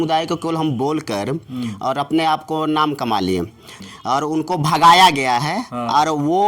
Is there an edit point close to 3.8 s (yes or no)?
yes